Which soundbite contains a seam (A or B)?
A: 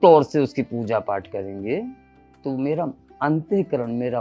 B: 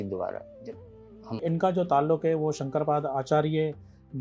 B